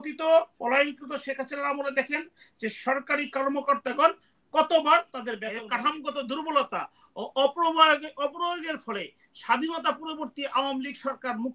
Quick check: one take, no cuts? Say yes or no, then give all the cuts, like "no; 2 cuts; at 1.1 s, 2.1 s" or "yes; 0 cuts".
no; 1 cut; at 5.6 s